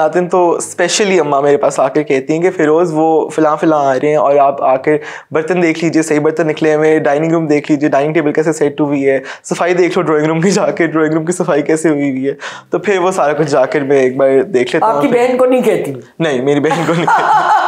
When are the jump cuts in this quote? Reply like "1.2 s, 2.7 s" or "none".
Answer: none